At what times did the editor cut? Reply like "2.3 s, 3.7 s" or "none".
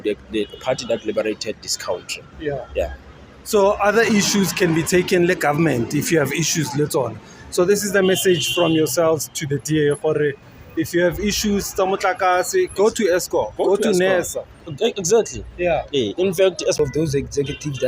16.8 s